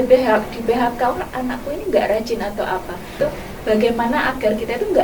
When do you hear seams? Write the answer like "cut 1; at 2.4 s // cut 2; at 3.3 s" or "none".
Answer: cut 1; at 3.2 s